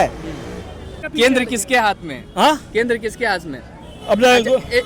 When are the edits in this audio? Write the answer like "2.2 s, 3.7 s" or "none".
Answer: 1.1 s